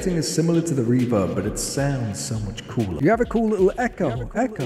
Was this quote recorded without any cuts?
no; 1 cut; at 3.0 s

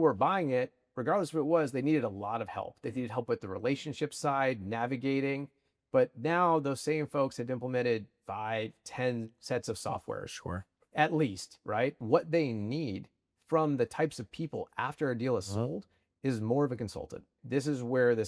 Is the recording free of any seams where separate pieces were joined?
no; 2 cuts; at 12.0 s, 17.3 s

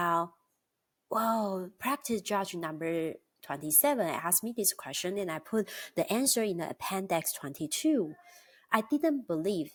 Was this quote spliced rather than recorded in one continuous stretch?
no; 0 cuts

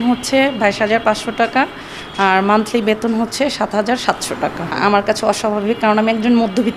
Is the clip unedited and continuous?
no; 1 cut; at 4.8 s

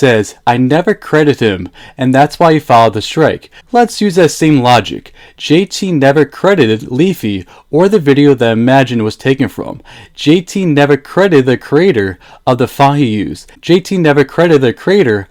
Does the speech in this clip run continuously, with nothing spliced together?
yes; 0 cuts

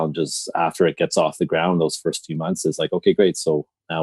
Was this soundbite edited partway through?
no; 0 cuts

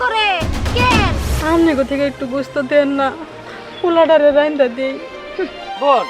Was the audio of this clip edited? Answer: yes; 1 cut; at 1.3 s

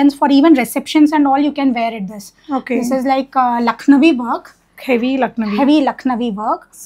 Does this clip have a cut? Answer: no; 0 cuts

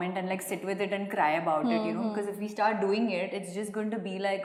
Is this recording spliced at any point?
no; 0 cuts

